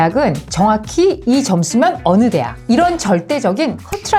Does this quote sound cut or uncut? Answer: uncut